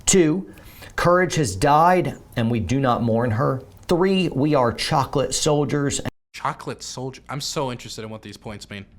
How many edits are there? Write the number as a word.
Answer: one